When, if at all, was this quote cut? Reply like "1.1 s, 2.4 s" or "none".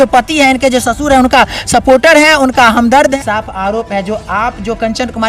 3.1 s